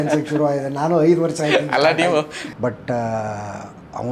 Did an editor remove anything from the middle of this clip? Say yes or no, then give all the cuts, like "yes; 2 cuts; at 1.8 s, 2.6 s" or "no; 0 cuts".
yes; 1 cut; at 2.4 s